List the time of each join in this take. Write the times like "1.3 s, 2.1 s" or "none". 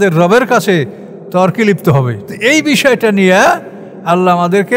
2.2 s